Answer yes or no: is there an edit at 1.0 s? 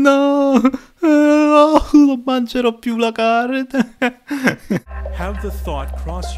no